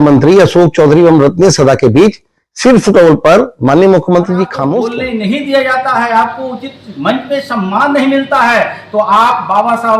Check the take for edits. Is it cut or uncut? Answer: cut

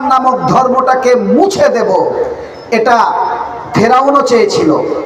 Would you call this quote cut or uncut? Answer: uncut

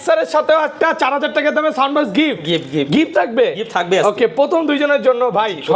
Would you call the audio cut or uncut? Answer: uncut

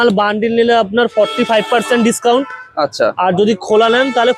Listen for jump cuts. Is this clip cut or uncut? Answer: uncut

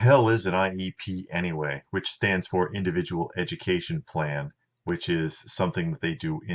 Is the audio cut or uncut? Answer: uncut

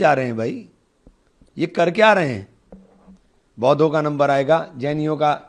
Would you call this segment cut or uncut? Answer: uncut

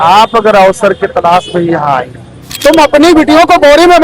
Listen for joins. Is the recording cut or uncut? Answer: cut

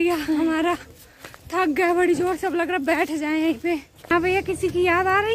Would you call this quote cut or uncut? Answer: cut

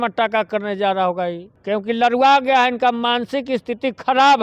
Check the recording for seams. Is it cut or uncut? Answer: cut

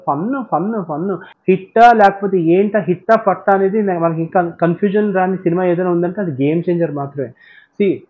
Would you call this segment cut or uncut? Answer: cut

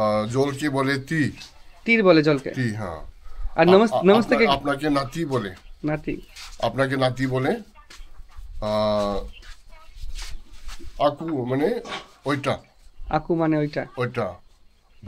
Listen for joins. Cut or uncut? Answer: uncut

